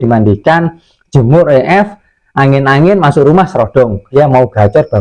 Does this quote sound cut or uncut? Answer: cut